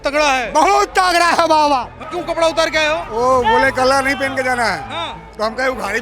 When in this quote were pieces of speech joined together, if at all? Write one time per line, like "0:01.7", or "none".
0:02.0